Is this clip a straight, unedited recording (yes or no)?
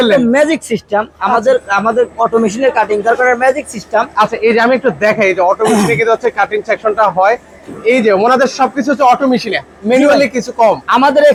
yes